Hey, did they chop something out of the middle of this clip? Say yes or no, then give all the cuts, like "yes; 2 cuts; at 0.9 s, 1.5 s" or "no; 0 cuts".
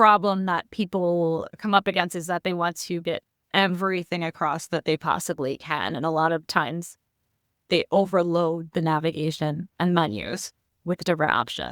yes; 1 cut; at 1.5 s